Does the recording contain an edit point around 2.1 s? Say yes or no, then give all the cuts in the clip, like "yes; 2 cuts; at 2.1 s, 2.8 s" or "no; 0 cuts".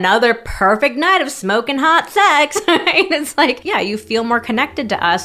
no; 1 cut; at 3.6 s